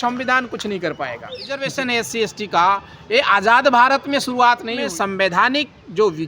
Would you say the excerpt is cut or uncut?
cut